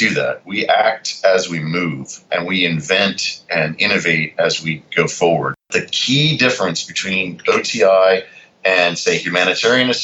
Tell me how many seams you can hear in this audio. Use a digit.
2